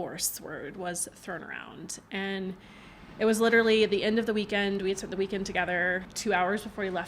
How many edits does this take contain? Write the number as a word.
one